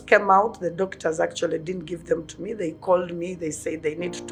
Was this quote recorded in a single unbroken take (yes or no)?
yes